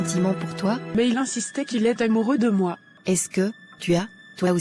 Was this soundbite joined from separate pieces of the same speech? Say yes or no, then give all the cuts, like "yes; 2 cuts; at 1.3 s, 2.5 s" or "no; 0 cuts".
yes; 2 cuts; at 0.9 s, 2.9 s